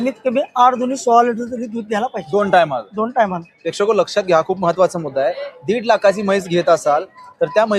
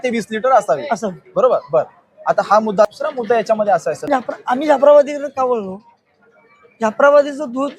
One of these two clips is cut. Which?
second; 1 cut; at 4.0 s

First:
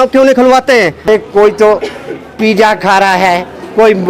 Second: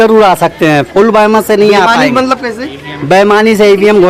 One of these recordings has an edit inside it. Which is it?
first; 1 cut; at 1.1 s

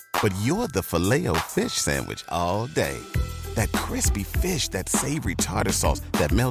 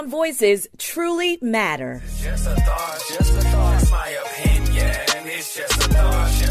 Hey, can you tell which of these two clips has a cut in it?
second; 1 cut; at 2.2 s

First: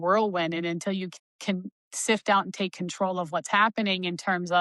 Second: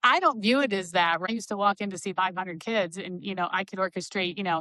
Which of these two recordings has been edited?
second; 1 cut; at 1.3 s

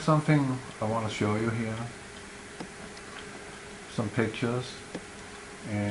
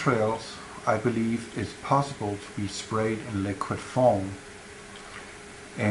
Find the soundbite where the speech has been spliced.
second; 1 cut; at 1.0 s

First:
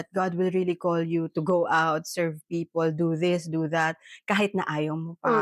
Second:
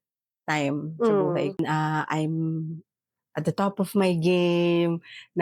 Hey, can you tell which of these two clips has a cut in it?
second; 1 cut; at 1.6 s

